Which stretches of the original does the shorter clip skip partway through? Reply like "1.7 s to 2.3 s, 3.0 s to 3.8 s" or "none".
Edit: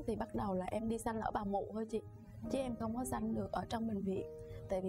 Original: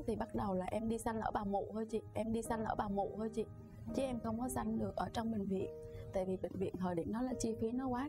2.0 s to 3.5 s